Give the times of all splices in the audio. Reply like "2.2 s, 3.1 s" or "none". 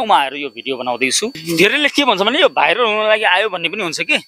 1.4 s